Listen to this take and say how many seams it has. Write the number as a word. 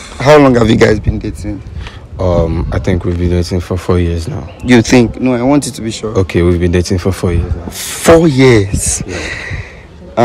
zero